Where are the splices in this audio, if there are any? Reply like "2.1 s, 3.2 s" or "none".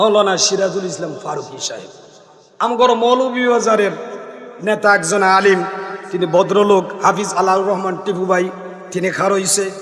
none